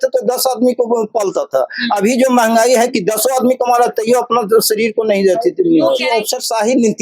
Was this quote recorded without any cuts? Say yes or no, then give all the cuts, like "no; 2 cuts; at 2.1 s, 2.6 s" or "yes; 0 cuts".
no; 1 cut; at 6.1 s